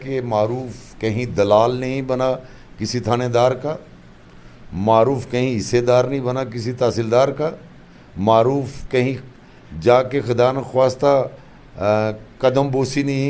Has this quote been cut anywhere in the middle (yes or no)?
no